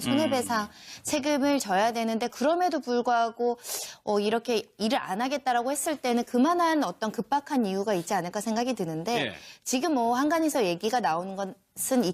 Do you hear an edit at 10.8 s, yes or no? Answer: no